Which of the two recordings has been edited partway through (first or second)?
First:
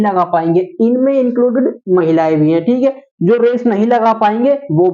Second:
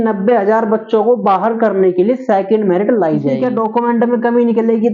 second